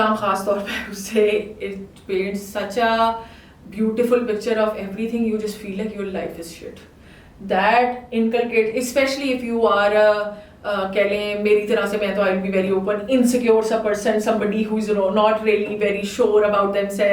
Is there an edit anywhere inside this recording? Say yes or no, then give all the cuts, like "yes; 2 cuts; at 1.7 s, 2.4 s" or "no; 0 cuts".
no; 0 cuts